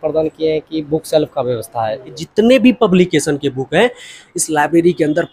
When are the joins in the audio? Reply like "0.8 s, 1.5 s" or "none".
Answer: 2.2 s